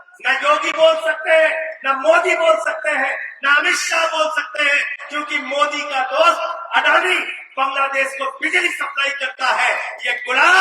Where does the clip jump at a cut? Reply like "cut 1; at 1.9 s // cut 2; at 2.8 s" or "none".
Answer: none

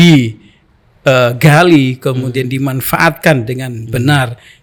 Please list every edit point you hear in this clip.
none

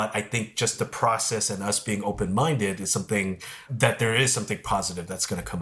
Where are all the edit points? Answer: cut 1; at 3.7 s

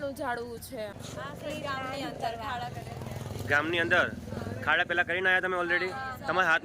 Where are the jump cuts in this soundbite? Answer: cut 1; at 0.9 s

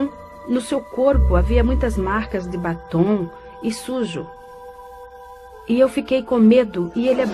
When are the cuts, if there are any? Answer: cut 1; at 3.1 s

